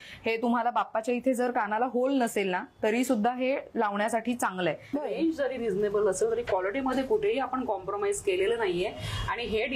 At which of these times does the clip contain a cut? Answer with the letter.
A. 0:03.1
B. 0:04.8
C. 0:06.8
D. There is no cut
B